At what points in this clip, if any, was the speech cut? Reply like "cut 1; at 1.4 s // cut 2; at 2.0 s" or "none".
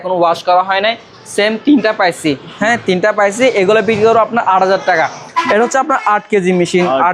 cut 1; at 5.3 s